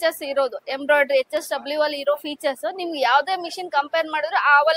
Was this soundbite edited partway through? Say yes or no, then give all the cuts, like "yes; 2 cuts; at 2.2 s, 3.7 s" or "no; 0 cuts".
no; 0 cuts